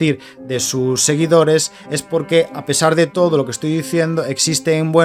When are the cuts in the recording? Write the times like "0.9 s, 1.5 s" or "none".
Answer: none